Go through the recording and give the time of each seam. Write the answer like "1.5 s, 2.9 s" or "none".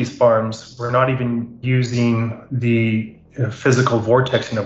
1.6 s